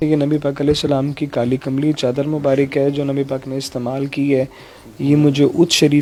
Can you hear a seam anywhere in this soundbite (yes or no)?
no